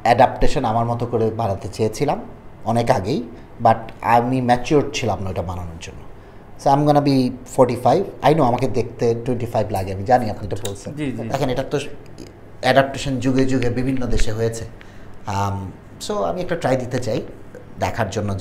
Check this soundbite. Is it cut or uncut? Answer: cut